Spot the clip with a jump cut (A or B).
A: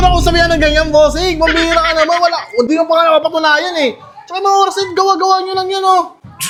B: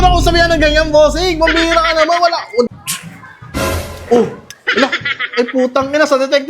B